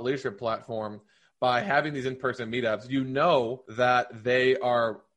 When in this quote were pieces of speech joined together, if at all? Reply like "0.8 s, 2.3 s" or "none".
3.6 s